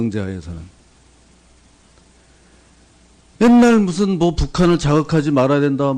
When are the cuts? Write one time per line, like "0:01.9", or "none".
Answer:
none